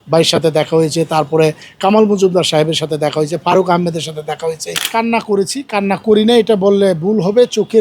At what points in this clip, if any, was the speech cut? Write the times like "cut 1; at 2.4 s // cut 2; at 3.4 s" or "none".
cut 1; at 4.7 s